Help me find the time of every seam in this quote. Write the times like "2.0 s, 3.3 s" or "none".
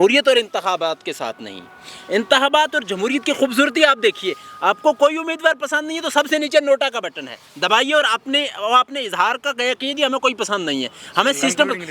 none